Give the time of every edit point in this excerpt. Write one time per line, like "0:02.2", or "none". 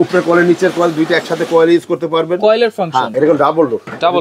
0:03.1